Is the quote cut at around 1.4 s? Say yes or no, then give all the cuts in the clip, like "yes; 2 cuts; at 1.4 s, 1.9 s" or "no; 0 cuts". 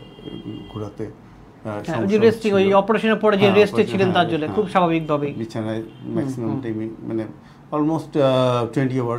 no; 0 cuts